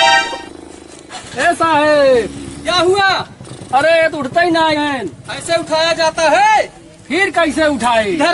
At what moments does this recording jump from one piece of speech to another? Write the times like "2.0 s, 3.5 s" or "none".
none